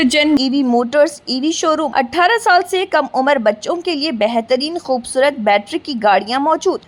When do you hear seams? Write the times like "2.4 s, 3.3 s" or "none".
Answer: 1.9 s